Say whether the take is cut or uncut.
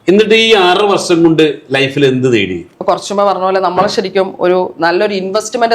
cut